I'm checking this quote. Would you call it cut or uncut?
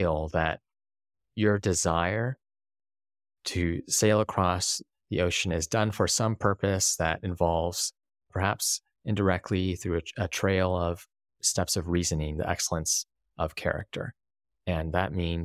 uncut